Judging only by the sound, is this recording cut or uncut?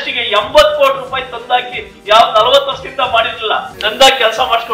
cut